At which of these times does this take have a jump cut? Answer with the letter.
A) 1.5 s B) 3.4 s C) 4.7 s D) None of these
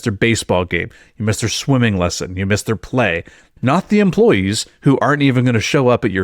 B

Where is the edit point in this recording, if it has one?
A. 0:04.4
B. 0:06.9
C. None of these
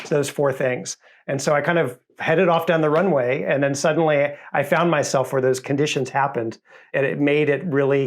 B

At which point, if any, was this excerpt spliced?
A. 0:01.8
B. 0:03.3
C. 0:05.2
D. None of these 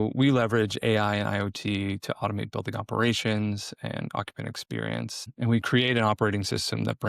C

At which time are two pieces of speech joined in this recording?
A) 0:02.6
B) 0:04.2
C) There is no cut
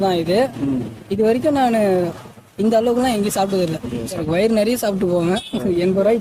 B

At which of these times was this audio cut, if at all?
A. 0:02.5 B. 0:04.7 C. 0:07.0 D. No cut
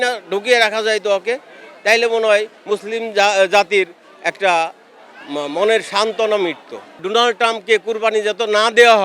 C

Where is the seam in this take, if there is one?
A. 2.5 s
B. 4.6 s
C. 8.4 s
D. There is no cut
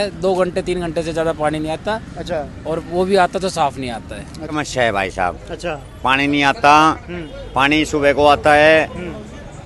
B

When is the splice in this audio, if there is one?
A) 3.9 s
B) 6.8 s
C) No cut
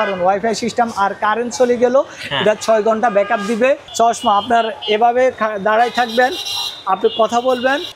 A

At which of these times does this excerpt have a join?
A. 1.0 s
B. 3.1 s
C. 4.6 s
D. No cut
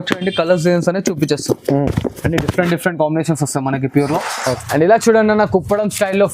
C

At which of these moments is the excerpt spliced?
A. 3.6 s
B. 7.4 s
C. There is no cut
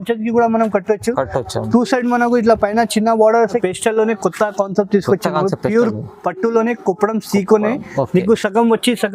A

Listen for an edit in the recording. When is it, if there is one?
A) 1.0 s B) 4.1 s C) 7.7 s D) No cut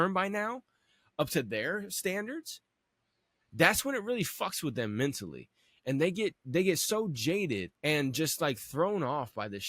C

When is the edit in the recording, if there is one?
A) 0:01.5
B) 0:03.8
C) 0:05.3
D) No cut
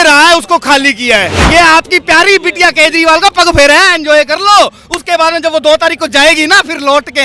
A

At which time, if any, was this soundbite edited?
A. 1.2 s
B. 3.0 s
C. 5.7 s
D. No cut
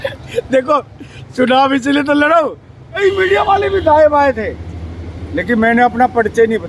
B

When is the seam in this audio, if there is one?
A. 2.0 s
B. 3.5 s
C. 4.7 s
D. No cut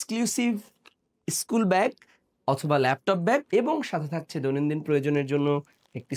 B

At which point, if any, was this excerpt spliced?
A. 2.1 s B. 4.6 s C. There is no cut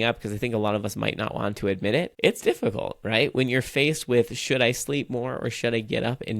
A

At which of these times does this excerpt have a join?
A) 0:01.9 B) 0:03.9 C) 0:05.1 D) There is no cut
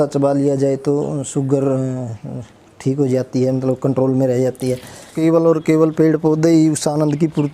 C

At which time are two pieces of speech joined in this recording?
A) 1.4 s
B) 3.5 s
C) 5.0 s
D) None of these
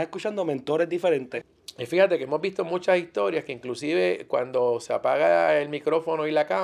A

